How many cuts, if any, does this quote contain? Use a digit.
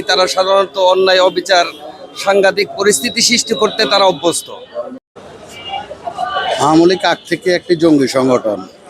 1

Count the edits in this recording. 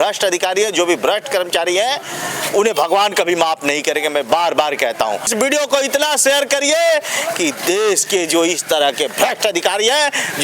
1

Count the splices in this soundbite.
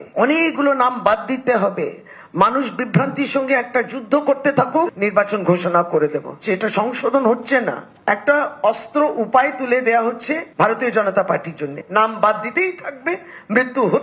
0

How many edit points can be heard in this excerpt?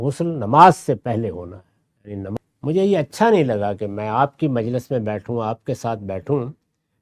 1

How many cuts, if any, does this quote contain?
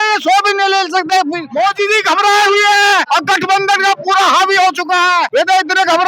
3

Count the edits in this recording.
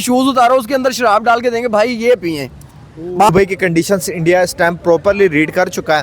1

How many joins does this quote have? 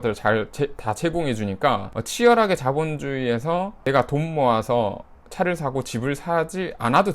2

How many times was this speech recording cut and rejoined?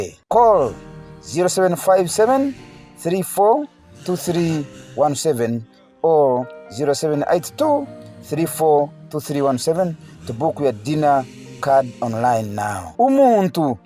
0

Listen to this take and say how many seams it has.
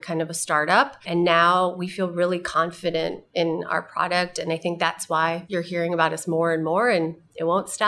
2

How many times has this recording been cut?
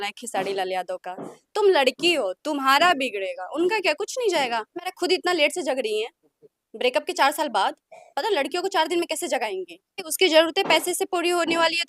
2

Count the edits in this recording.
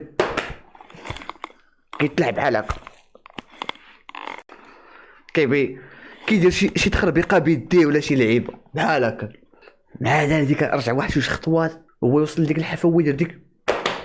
1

